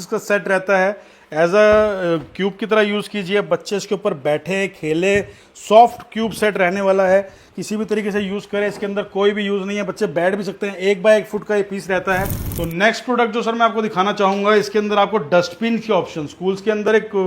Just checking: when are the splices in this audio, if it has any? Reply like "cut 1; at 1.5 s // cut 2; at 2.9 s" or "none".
cut 1; at 12.4 s